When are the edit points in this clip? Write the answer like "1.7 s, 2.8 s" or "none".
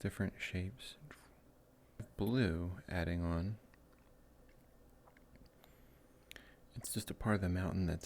2.1 s